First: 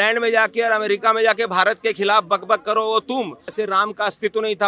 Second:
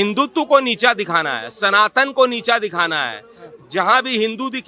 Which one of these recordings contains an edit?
first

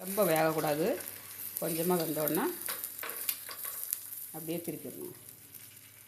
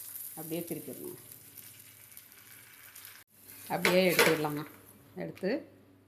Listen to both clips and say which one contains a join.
second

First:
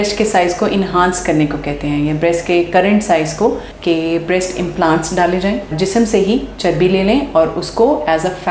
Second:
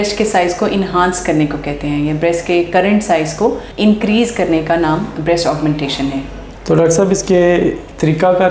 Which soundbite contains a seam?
first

